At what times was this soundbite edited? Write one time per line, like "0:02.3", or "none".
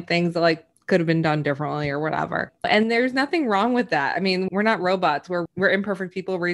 0:02.7
0:04.5
0:05.5